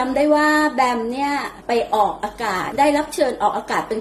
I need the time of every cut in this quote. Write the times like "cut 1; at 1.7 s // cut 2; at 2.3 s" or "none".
cut 1; at 2.6 s